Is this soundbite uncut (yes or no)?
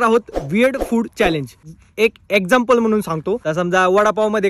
no